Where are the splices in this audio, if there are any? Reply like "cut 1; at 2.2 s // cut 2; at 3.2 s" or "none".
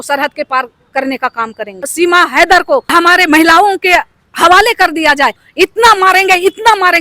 cut 1; at 1.9 s // cut 2; at 2.9 s // cut 3; at 5.4 s